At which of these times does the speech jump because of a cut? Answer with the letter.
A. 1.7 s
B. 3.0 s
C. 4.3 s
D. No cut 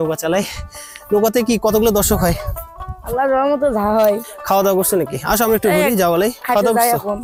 C